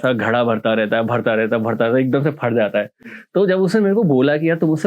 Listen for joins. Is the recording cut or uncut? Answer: uncut